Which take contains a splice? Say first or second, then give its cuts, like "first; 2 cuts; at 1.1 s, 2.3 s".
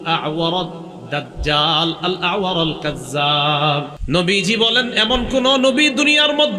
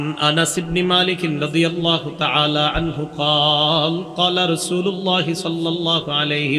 first; 1 cut; at 4.0 s